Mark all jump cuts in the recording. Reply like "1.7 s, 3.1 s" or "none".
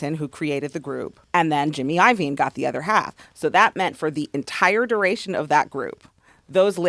1.2 s